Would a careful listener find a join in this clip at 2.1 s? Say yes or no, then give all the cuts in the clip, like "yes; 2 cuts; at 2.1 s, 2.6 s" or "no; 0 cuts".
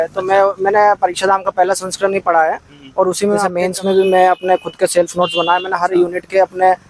no; 1 cut; at 3.5 s